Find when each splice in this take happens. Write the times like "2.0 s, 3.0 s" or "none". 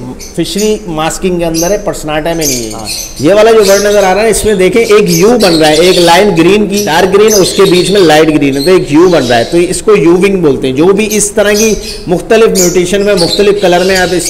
3.2 s, 6.8 s